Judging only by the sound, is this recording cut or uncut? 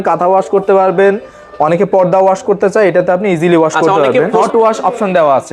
cut